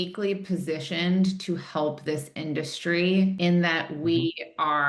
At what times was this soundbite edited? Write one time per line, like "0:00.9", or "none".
0:03.4